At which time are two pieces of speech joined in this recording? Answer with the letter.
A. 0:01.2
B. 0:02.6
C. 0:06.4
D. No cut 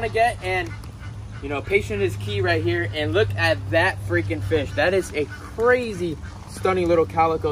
D